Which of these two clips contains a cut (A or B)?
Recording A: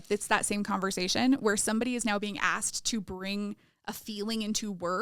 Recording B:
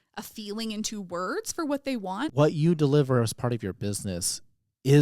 B